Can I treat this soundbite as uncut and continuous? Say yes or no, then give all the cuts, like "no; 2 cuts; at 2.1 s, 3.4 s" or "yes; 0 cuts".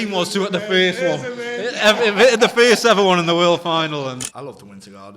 no; 1 cut; at 4.2 s